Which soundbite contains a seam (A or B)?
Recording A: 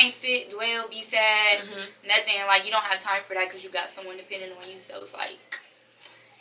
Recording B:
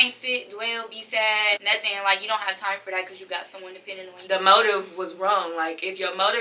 B